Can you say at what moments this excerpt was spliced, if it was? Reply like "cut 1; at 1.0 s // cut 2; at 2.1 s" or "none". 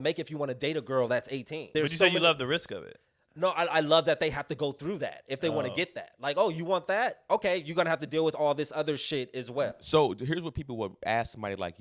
none